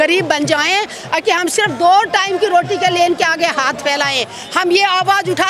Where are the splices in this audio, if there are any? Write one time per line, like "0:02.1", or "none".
none